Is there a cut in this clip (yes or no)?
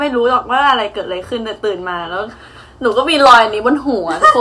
no